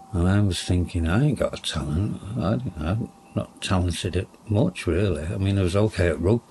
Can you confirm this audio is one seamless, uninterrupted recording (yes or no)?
yes